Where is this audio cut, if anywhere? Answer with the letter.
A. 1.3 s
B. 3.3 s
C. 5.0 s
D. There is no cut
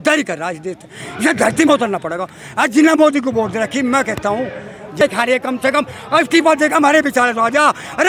C